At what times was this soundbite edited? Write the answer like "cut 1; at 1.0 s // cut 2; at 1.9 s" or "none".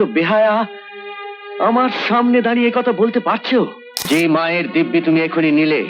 cut 1; at 4.0 s